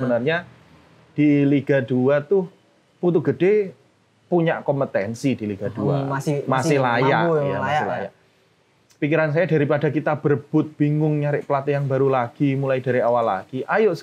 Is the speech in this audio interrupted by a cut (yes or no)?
no